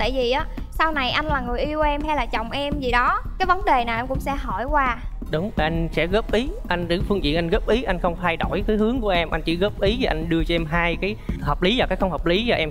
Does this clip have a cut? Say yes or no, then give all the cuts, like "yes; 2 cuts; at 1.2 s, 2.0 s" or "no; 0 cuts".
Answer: no; 0 cuts